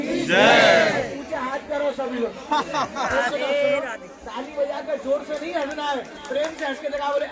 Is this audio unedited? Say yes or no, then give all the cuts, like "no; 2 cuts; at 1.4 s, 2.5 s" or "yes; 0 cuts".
yes; 0 cuts